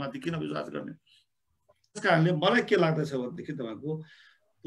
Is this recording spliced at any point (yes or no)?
yes